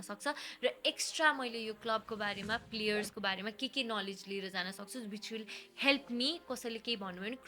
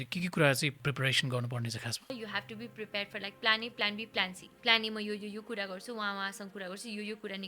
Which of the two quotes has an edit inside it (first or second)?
second